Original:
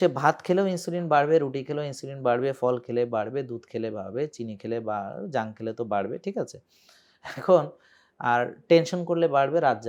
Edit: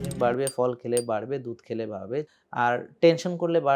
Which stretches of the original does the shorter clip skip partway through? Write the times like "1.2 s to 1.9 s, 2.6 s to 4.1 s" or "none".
4.4 s to 8.1 s